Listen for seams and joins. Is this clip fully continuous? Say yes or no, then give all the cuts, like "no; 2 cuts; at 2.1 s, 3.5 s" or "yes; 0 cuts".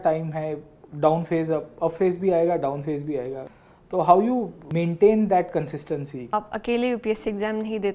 no; 3 cuts; at 3.5 s, 4.6 s, 6.3 s